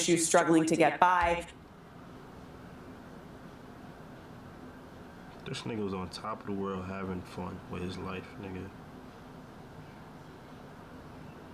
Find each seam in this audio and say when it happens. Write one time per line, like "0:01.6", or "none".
none